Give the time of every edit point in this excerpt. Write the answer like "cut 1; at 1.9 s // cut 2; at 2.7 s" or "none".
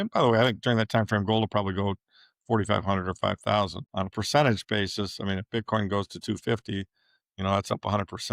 none